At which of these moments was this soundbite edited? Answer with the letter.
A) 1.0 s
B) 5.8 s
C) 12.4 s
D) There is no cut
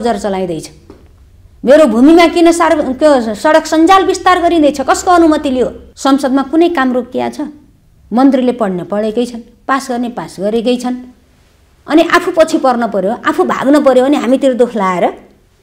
B